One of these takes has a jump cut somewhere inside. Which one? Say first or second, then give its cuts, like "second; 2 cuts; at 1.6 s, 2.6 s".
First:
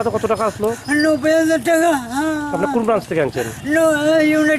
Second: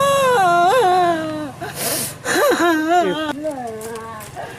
second; 1 cut; at 3.3 s